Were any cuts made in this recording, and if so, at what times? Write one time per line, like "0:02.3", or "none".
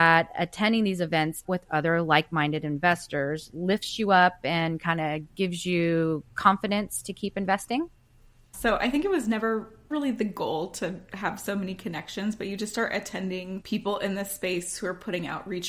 0:01.4
0:08.5